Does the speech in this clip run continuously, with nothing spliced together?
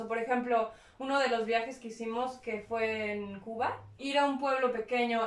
no; 1 cut; at 4.0 s

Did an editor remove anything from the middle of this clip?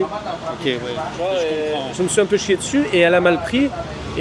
no; 0 cuts

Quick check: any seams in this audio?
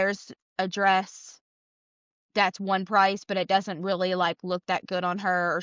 no; 0 cuts

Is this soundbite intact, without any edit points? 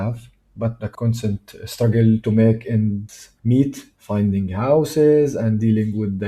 yes; 0 cuts

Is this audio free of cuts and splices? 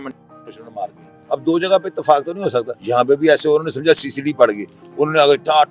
no; 2 cuts; at 1.2 s, 2.8 s

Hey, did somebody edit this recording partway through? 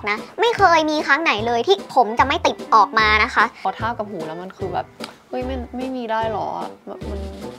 yes; 1 cut; at 3.6 s

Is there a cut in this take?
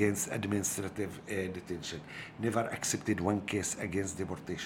no; 0 cuts

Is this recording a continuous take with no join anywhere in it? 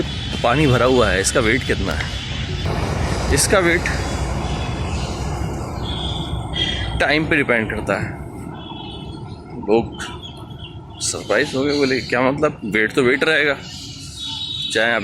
no; 1 cut; at 2.7 s

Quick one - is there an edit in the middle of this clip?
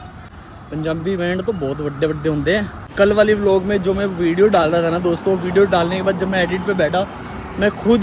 no; 0 cuts

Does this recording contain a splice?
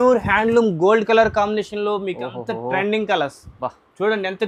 no; 0 cuts

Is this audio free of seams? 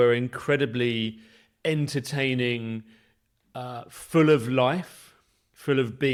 yes; 0 cuts

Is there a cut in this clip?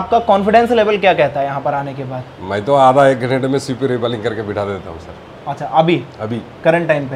no; 0 cuts

